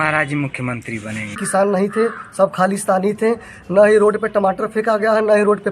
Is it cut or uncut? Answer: cut